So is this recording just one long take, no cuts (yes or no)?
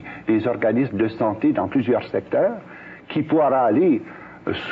yes